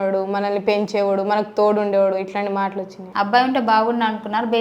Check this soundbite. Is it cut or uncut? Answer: cut